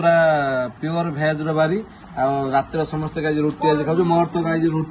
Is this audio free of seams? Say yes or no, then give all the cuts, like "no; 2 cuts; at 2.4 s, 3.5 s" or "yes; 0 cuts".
yes; 0 cuts